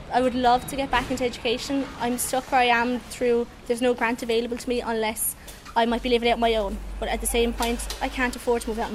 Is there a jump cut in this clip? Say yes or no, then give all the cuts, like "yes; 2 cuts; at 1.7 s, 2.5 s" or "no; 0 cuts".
no; 0 cuts